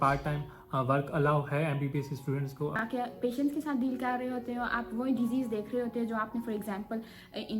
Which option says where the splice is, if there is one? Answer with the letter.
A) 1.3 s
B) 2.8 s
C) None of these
B